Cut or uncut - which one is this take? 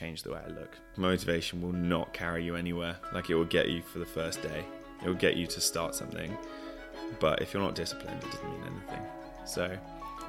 cut